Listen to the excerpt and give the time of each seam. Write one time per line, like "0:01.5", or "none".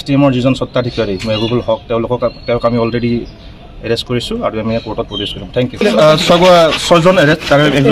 0:05.8